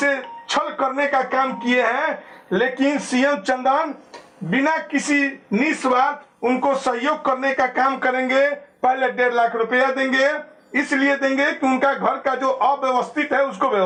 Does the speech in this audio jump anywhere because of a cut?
no; 0 cuts

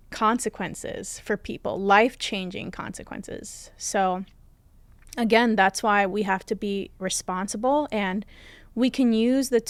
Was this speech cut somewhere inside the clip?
no; 0 cuts

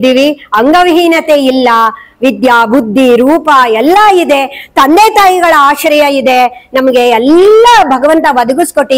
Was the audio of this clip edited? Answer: no; 0 cuts

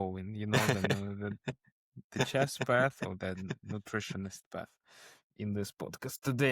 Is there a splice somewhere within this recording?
no; 0 cuts

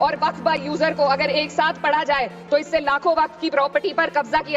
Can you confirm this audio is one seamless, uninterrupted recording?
yes; 0 cuts

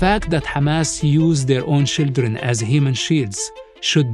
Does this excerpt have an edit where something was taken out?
no; 0 cuts

